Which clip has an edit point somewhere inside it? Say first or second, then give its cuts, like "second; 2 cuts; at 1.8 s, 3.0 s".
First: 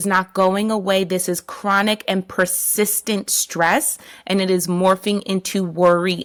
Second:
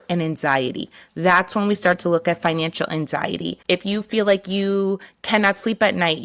second; 1 cut; at 3.5 s